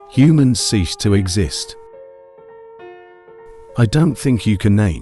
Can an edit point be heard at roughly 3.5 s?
yes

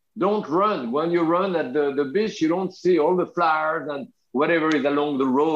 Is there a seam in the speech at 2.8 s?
no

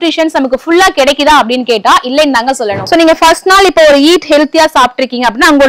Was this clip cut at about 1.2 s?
no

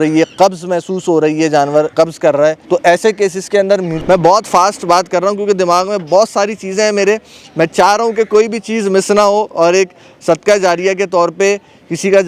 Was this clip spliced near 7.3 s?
no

